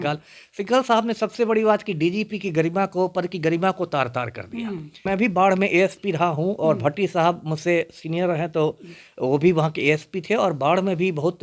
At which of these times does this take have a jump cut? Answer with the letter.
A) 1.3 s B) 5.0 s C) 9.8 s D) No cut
B